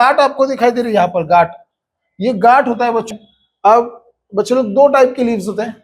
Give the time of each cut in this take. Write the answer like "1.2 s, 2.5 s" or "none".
3.1 s